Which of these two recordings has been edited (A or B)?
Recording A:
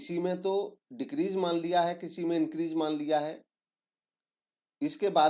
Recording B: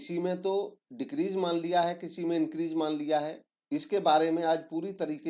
B